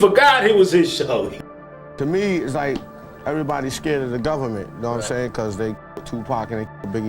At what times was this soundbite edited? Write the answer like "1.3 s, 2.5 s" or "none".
1.3 s